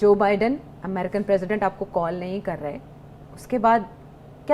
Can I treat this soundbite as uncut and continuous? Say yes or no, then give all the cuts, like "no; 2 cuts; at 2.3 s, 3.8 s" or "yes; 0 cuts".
yes; 0 cuts